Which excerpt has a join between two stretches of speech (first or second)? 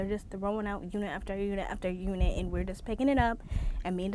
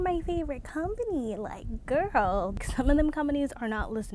second